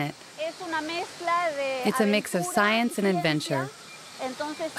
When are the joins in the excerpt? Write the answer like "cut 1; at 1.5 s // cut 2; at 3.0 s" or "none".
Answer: none

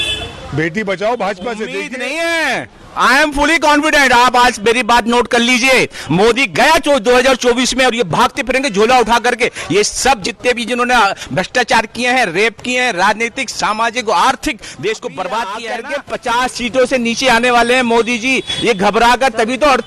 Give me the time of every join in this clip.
cut 1; at 1.9 s // cut 2; at 15.9 s

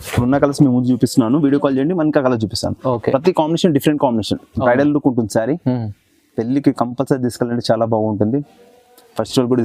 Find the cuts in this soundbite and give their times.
none

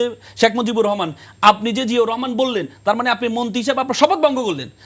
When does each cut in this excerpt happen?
none

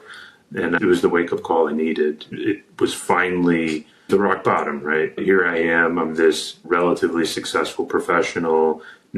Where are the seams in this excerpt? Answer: cut 1; at 0.8 s // cut 2; at 2.3 s // cut 3; at 4.1 s // cut 4; at 5.1 s

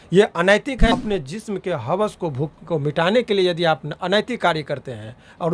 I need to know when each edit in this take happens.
cut 1; at 0.9 s

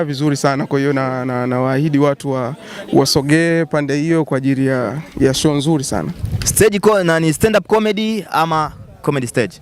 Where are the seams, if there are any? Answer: none

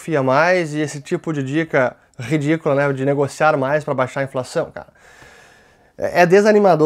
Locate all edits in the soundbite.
none

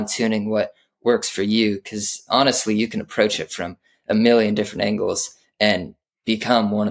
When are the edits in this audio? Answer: none

